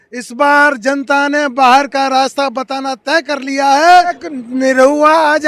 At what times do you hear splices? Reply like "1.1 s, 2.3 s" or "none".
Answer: 4.3 s